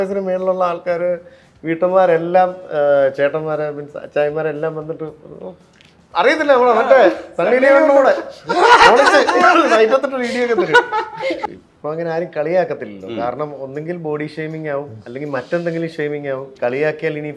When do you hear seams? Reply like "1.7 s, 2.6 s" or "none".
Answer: 11.5 s, 16.5 s